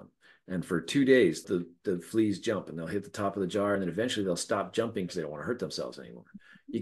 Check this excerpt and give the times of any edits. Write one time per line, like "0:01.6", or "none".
0:01.4
0:03.8
0:05.1